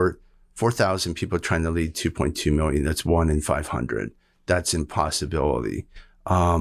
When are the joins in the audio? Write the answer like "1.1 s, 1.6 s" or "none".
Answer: none